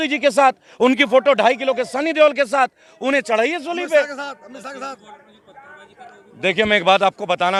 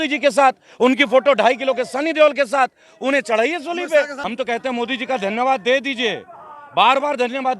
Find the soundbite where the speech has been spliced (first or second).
second